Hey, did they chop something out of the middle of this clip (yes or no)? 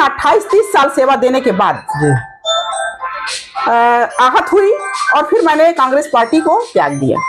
no